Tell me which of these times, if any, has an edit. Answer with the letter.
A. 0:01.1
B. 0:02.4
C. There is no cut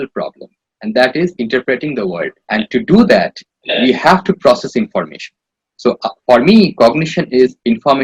B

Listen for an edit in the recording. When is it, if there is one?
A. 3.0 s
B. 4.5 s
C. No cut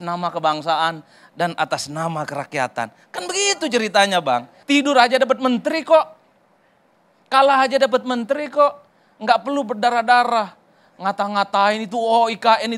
B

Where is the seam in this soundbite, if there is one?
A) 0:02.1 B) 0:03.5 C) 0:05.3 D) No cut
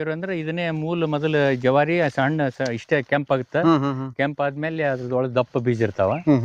D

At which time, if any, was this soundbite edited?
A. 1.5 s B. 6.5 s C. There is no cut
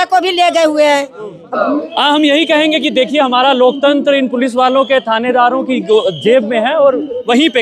A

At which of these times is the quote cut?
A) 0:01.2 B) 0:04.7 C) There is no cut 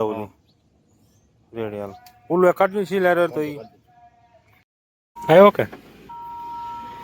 B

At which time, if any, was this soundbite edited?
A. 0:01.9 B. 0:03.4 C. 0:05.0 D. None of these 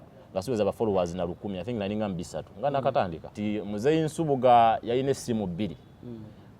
B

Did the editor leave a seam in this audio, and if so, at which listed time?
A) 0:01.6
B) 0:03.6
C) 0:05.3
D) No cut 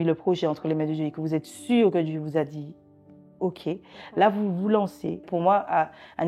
C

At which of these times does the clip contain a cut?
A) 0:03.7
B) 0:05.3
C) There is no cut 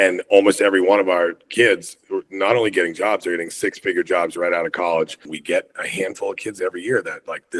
B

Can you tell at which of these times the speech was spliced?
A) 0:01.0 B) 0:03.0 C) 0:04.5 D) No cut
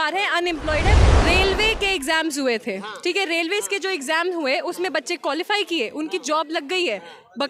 A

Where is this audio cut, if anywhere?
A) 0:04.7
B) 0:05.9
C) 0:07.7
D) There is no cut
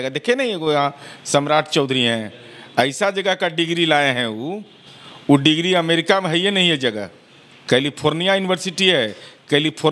D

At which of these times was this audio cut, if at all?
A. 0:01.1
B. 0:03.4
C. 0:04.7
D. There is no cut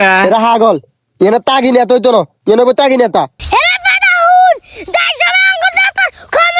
B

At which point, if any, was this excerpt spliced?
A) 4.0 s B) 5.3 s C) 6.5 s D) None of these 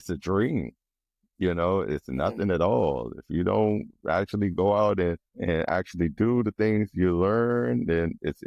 B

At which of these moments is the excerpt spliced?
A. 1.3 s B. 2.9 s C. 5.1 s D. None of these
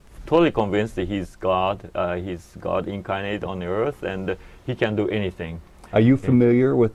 D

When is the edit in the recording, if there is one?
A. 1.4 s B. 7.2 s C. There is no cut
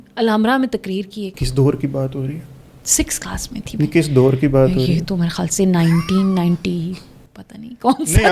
A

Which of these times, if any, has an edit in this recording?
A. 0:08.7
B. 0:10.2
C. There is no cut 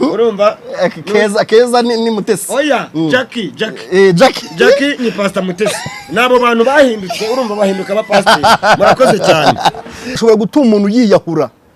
B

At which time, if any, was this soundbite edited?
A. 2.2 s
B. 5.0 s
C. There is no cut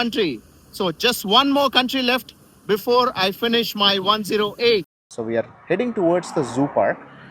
B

